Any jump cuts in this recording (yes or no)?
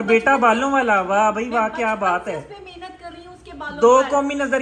no